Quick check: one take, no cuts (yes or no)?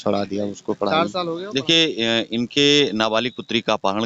no